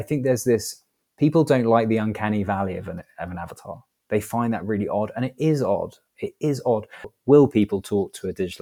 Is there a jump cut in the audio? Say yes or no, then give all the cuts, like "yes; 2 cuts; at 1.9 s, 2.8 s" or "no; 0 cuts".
yes; 1 cut; at 7.1 s